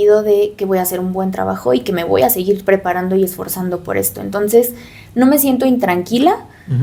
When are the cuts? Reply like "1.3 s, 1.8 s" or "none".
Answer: none

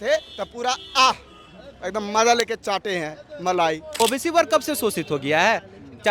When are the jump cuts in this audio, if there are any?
3.9 s

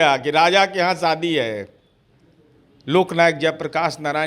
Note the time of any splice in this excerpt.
none

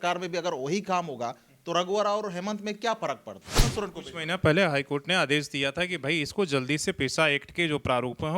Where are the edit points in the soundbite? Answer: 3.7 s

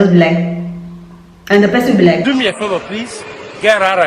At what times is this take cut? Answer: 2.2 s

